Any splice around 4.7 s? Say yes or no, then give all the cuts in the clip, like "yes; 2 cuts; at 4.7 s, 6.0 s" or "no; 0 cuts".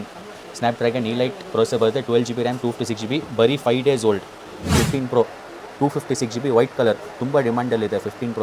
yes; 1 cut; at 4.7 s